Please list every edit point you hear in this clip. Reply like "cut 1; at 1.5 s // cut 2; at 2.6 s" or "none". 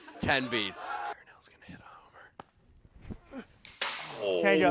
cut 1; at 1.1 s